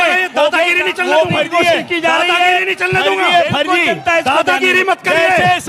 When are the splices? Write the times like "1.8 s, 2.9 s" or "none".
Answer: none

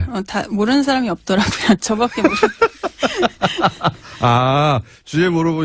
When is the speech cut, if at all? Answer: 1.9 s

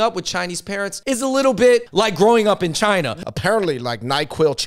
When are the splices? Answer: 0.9 s, 1.9 s, 3.1 s

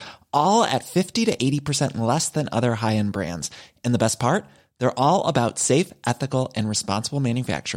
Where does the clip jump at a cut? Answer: none

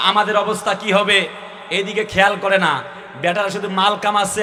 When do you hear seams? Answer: none

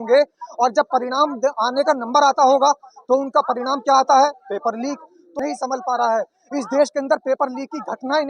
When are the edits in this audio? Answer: 5.4 s

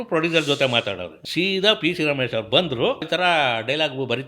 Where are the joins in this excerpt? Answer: 1.1 s, 3.0 s

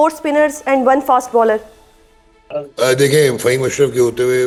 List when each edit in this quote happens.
none

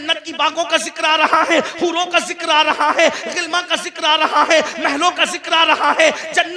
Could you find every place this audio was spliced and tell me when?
none

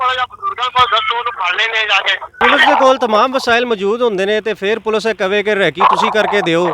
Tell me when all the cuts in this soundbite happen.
2.4 s

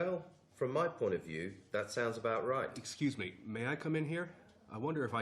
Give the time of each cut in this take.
2.8 s

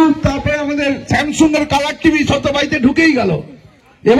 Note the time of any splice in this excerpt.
none

